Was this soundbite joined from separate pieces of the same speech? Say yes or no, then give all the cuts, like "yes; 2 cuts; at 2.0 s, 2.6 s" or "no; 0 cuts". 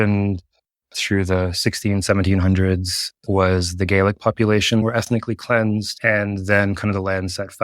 yes; 1 cut; at 4.8 s